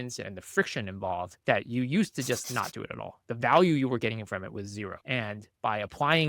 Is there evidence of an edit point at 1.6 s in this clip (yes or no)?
no